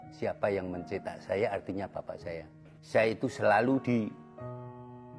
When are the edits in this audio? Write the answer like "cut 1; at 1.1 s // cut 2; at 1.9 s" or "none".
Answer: cut 1; at 2.7 s